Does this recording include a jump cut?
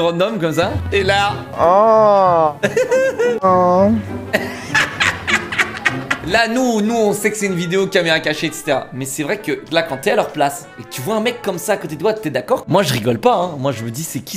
yes; 3 cuts; at 1.1 s, 3.4 s, 6.2 s

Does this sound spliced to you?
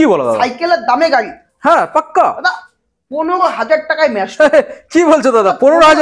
no; 0 cuts

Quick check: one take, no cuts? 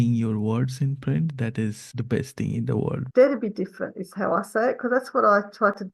no; 2 cuts; at 1.8 s, 3.0 s

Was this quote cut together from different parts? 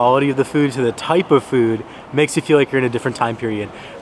no; 0 cuts

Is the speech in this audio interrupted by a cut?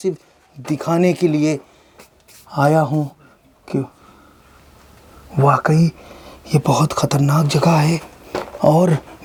no; 0 cuts

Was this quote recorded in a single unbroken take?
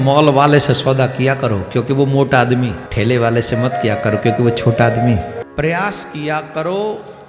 no; 2 cuts; at 2.8 s, 5.4 s

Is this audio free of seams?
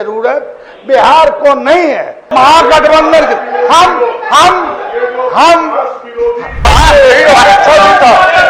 no; 2 cuts; at 2.2 s, 6.7 s

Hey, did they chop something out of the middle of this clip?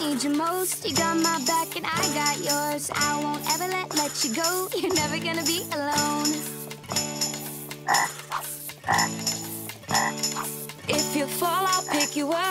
no; 0 cuts

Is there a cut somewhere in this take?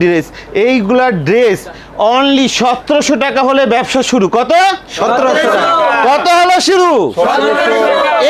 no; 0 cuts

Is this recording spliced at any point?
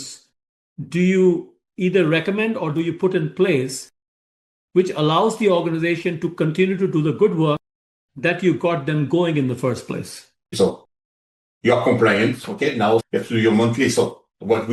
yes; 2 cuts; at 10.5 s, 13.1 s

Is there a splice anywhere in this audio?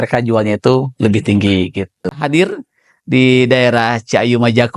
yes; 1 cut; at 2.2 s

